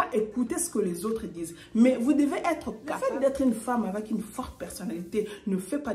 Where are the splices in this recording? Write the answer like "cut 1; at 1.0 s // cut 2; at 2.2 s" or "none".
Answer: cut 1; at 3.0 s